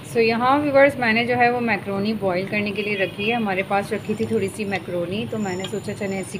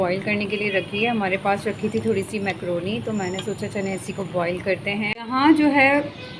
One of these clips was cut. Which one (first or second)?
second